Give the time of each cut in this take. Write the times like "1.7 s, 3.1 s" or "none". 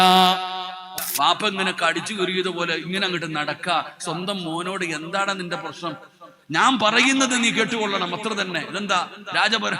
0.9 s